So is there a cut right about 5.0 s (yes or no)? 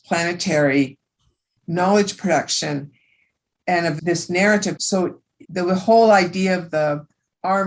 yes